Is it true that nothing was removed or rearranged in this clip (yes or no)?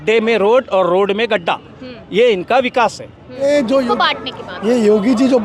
no